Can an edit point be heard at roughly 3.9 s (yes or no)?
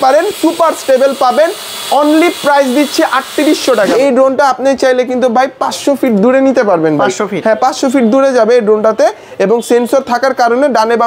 yes